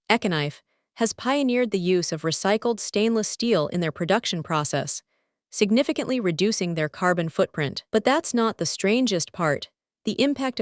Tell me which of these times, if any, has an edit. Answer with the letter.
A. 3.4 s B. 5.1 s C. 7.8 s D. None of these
C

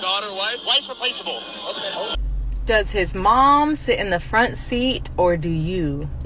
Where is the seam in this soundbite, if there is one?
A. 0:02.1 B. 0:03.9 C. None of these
A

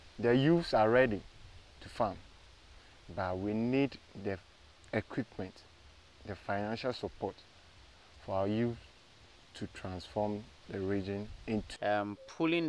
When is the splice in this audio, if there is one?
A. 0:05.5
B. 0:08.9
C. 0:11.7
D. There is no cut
C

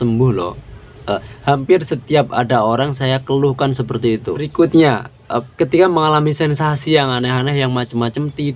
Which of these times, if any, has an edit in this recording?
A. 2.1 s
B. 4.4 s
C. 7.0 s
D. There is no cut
B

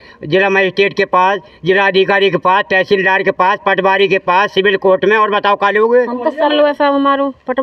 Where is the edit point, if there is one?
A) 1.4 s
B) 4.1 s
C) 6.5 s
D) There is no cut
C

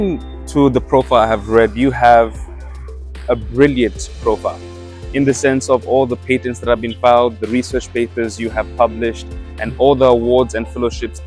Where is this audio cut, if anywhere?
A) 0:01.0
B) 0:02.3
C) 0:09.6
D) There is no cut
D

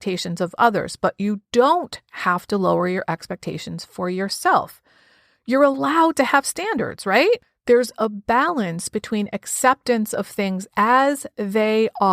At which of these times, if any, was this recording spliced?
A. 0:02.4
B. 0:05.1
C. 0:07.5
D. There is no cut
C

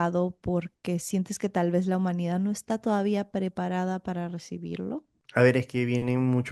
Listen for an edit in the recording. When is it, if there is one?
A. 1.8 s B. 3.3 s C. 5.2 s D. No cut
C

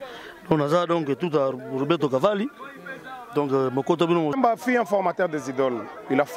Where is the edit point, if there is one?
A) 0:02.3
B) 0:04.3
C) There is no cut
B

